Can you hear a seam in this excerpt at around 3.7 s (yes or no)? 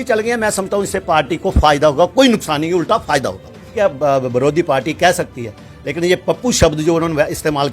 yes